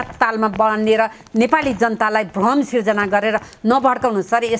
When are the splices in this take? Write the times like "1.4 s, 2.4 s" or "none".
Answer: none